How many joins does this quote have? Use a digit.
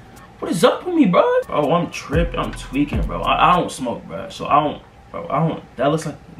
0